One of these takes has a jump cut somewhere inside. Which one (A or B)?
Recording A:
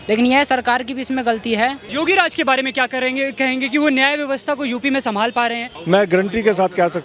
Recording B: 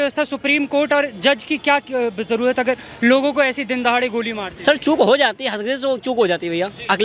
A